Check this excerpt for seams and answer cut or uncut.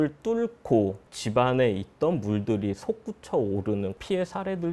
uncut